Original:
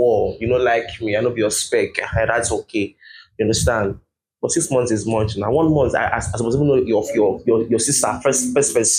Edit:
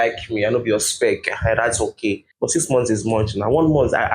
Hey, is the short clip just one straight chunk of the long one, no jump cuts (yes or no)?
no